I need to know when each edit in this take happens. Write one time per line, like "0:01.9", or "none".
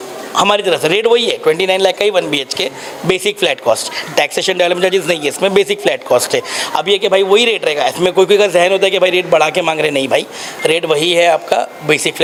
none